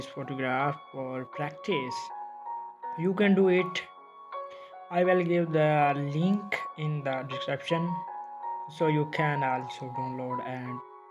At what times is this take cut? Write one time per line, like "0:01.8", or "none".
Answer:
none